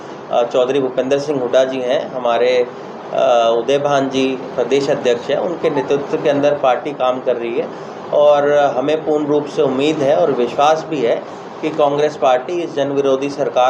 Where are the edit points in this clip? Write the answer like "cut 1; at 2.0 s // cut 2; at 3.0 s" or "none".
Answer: none